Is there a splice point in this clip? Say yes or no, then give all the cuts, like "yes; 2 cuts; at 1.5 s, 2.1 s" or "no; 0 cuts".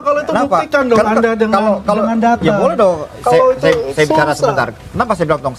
no; 0 cuts